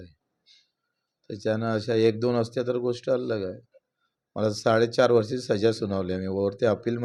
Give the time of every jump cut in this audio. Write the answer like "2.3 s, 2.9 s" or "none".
none